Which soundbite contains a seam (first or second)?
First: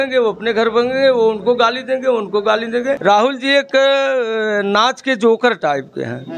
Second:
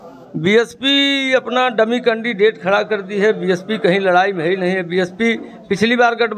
first